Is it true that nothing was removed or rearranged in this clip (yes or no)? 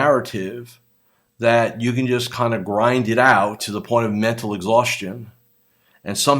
no